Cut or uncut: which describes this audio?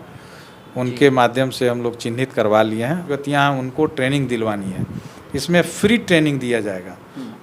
cut